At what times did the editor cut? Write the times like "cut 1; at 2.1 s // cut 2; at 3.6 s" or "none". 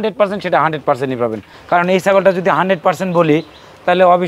cut 1; at 1.5 s